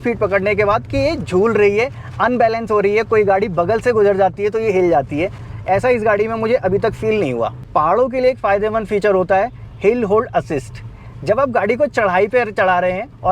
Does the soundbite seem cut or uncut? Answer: uncut